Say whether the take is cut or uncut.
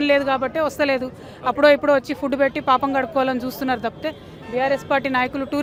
uncut